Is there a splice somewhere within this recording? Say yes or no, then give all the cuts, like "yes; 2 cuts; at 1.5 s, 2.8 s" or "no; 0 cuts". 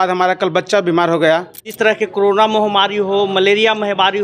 yes; 1 cut; at 1.7 s